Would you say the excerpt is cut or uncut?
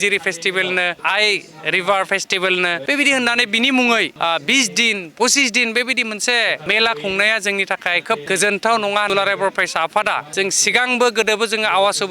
cut